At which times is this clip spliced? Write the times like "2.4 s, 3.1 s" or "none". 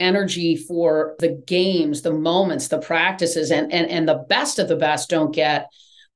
1.1 s